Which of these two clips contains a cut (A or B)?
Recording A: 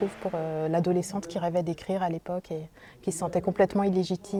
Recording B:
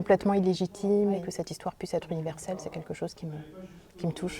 B